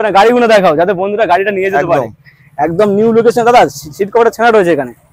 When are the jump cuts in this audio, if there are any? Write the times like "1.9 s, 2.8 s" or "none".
none